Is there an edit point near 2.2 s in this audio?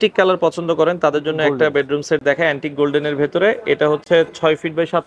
no; 0 cuts

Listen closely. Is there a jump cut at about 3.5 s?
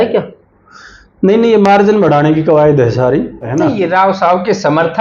yes; 1 cut; at 3.5 s

